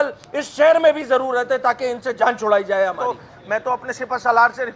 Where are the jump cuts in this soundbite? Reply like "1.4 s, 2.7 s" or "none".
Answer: 3.0 s